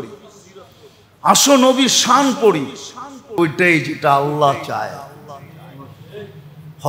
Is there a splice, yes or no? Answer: yes